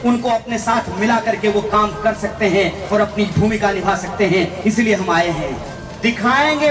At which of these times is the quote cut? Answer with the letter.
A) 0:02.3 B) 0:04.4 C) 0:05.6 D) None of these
C